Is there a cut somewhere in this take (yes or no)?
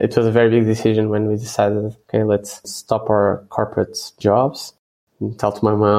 no